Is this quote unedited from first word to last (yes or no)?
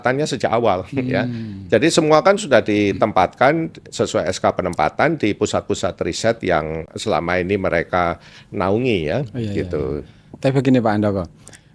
yes